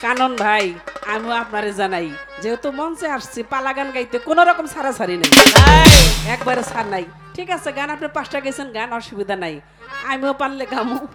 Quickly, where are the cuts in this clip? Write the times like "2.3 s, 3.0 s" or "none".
none